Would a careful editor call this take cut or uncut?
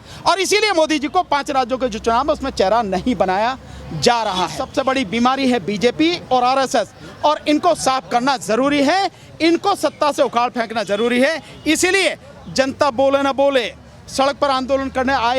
cut